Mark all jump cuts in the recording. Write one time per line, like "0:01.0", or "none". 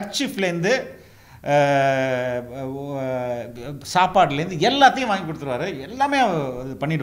none